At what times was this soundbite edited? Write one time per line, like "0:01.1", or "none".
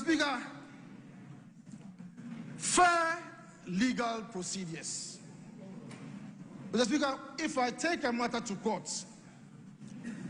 none